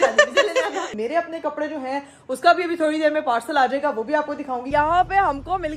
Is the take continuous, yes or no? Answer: no